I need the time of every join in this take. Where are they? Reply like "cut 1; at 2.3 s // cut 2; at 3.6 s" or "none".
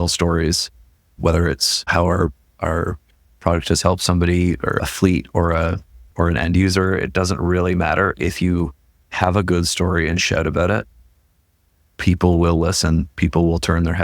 cut 1; at 1.9 s // cut 2; at 4.8 s